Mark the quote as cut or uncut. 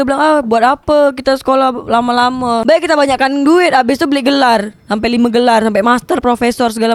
uncut